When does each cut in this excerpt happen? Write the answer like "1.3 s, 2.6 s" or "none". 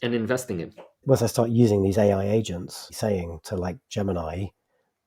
1.0 s, 2.9 s